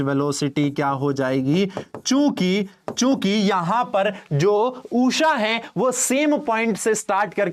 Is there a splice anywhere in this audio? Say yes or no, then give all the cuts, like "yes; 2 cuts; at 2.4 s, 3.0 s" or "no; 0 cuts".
no; 0 cuts